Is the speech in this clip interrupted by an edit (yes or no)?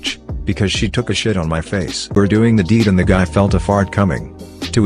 yes